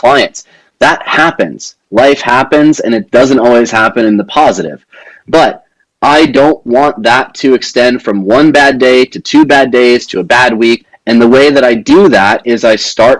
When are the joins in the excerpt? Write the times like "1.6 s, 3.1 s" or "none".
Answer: 10.9 s